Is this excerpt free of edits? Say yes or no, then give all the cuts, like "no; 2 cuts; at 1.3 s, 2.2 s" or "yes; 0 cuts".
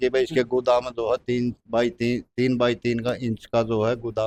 yes; 0 cuts